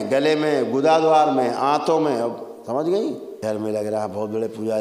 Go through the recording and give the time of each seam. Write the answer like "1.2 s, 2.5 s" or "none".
3.3 s